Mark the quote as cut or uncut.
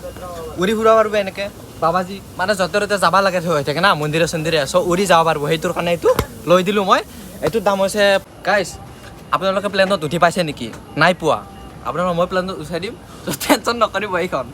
cut